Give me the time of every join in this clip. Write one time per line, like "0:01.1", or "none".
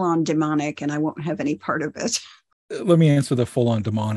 0:02.3

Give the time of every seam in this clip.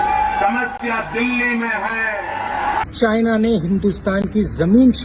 0:02.9

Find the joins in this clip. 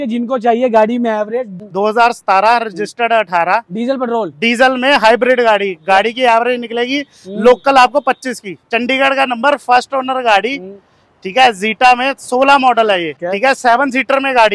0:01.6
0:08.5
0:13.1

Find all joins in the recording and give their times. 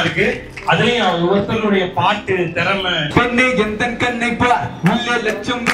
0:03.1

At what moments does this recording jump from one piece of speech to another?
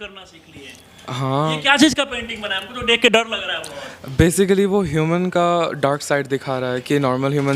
none

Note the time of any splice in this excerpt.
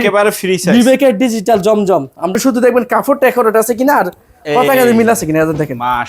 0:02.3

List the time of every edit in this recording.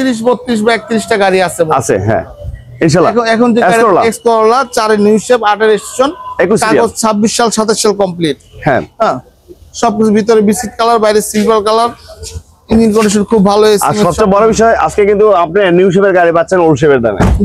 none

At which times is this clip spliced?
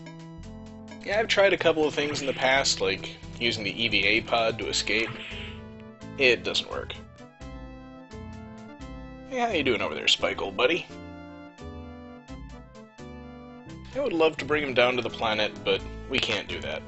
none

